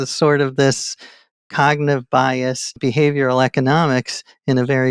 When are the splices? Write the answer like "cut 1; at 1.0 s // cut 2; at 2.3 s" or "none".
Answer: cut 1; at 2.8 s